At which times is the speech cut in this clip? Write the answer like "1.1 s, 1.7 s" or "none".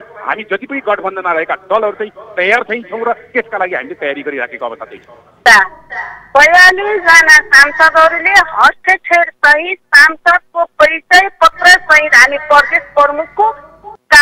5.4 s